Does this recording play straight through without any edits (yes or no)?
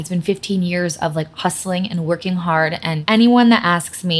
no